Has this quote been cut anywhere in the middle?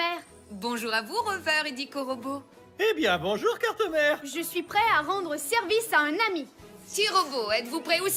no; 0 cuts

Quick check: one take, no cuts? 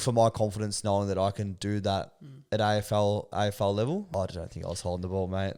no; 1 cut; at 4.1 s

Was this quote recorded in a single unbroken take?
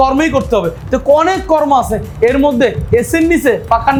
yes; 0 cuts

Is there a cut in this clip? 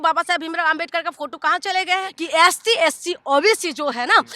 yes; 1 cut; at 2.1 s

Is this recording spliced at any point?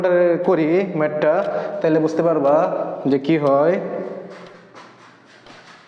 no; 0 cuts

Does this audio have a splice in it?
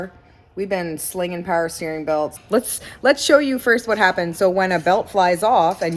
yes; 1 cut; at 2.4 s

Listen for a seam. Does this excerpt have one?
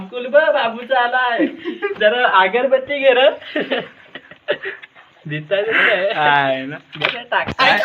no; 0 cuts

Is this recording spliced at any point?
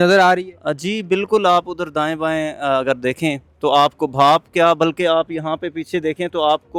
no; 0 cuts

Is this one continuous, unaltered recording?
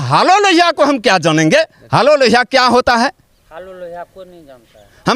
yes; 0 cuts

